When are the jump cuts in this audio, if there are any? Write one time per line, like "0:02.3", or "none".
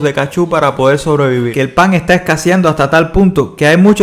0:01.5

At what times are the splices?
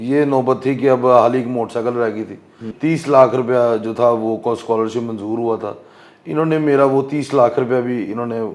0:02.7

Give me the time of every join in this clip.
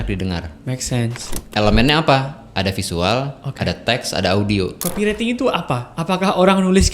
0:04.8

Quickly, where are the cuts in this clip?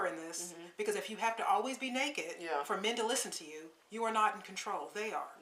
none

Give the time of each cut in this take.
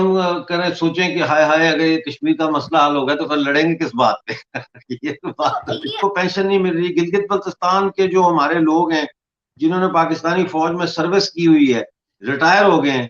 0:06.0

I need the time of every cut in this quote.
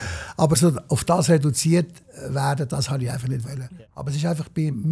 0:03.7

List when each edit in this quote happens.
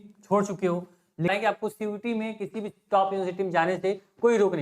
0:01.3

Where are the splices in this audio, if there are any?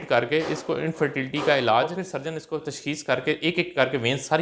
0:02.1

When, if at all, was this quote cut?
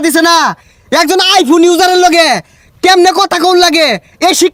none

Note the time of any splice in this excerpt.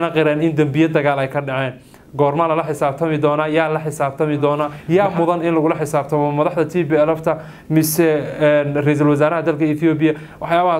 0:04.7

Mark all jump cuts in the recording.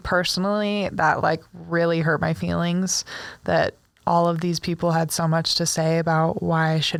none

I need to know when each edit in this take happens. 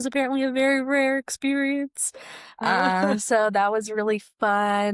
none

